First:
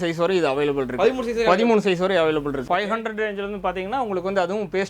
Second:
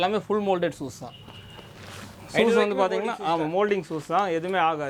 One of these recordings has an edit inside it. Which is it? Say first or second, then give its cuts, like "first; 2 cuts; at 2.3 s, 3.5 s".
first; 1 cut; at 2.6 s